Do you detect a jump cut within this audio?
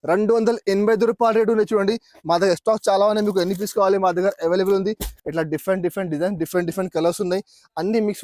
yes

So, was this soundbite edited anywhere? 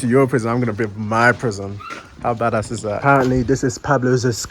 yes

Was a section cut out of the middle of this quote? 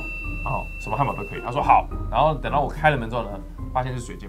no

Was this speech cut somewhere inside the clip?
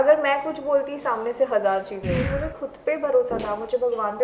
yes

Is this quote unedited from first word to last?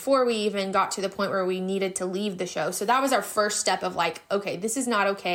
yes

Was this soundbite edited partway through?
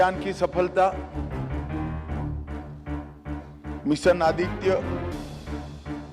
yes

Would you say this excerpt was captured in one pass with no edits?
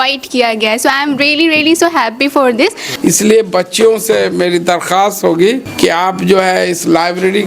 no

